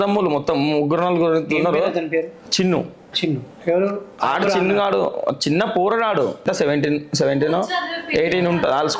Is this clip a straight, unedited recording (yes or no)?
no